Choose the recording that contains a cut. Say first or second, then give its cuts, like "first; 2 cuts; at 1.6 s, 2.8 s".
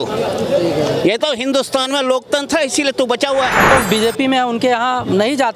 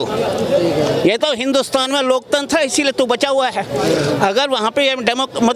first; 1 cut; at 3.7 s